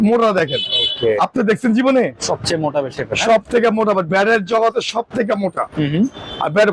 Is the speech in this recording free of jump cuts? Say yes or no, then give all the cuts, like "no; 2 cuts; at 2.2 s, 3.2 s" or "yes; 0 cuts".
yes; 0 cuts